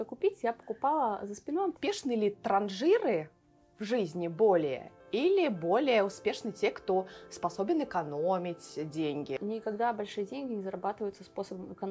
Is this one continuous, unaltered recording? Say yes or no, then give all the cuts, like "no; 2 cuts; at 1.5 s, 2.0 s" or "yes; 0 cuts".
no; 2 cuts; at 1.8 s, 9.3 s